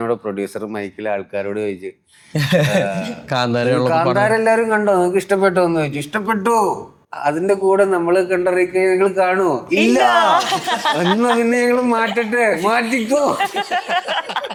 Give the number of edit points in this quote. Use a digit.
0